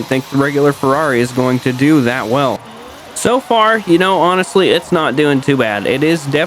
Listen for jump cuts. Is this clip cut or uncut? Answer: cut